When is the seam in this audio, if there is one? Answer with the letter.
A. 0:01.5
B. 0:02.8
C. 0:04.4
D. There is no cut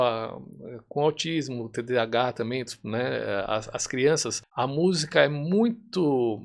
C